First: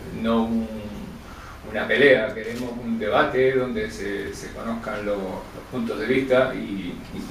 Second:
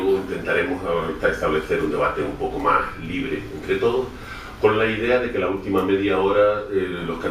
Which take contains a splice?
second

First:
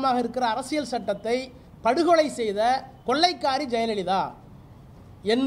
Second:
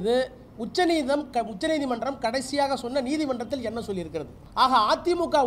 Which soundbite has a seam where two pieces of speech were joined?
second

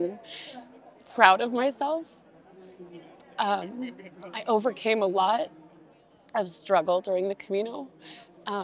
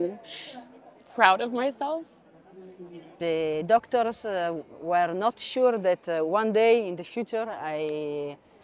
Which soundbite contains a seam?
second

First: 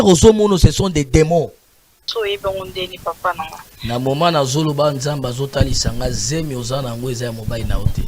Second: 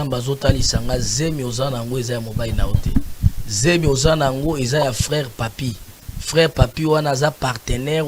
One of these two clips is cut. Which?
first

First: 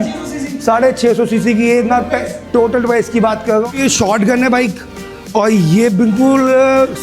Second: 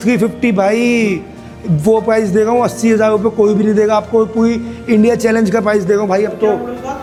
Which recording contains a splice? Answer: first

